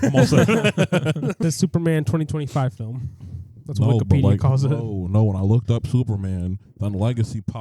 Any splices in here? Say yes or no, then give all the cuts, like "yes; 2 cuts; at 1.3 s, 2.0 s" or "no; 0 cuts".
yes; 1 cut; at 1.4 s